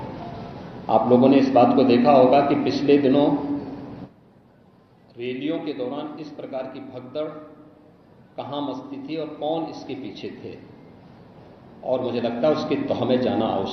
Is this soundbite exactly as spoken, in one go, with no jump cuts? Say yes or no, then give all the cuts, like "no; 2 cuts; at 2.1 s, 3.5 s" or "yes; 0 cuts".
yes; 0 cuts